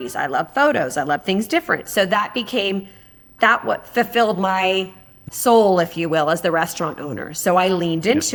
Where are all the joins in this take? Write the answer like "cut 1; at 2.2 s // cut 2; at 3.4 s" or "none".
none